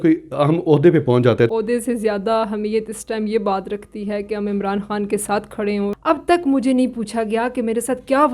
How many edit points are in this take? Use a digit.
2